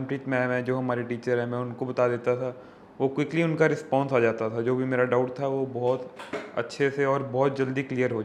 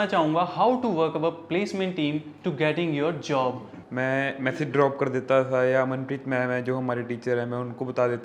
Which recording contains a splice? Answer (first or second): second